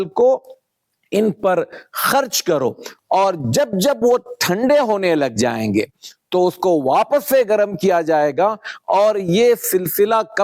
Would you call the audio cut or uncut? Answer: cut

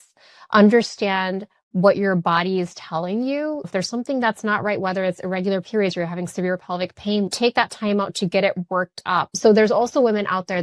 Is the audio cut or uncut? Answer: cut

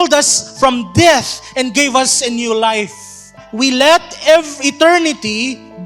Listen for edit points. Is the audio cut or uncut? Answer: cut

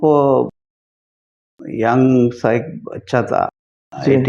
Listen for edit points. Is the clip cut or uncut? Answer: uncut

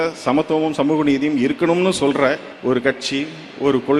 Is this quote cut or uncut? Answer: cut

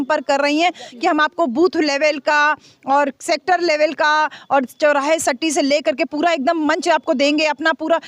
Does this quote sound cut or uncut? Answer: uncut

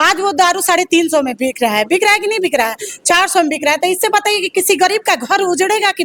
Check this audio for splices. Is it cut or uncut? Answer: uncut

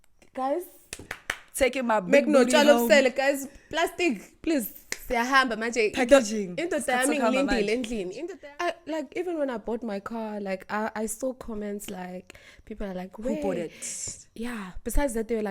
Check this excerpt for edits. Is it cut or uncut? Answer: cut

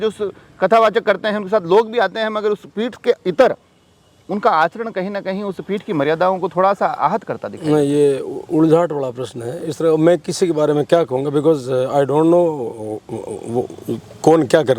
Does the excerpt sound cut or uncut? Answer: uncut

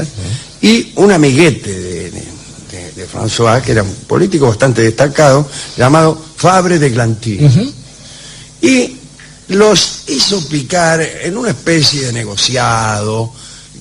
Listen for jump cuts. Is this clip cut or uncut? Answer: uncut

